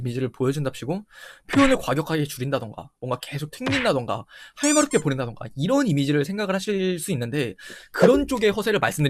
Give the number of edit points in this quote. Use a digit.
0